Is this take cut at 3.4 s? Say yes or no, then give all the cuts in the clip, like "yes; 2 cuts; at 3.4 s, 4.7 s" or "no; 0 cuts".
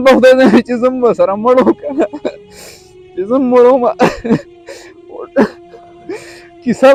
no; 0 cuts